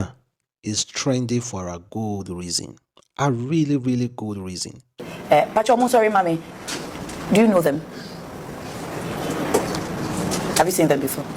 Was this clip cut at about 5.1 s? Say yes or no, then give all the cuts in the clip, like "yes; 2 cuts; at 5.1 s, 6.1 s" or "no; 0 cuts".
yes; 1 cut; at 5.1 s